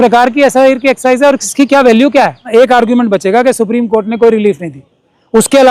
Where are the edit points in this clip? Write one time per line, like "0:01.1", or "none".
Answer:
0:02.4